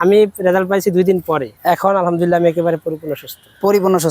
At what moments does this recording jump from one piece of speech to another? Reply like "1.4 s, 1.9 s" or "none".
1.5 s